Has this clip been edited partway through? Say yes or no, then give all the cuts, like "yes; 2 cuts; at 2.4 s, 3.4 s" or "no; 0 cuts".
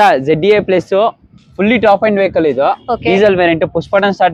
no; 0 cuts